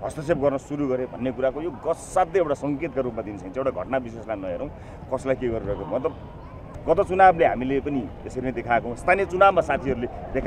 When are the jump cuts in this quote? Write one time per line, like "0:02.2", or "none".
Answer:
0:06.6